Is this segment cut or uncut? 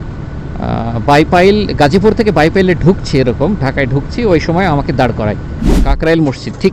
cut